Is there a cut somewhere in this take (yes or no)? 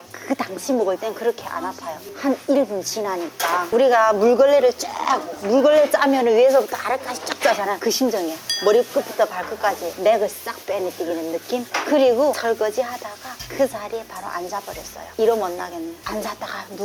no